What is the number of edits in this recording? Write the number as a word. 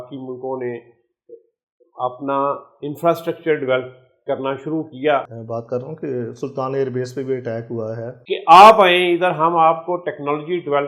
two